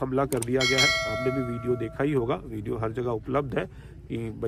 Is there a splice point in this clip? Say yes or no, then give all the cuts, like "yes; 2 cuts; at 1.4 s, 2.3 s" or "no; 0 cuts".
no; 0 cuts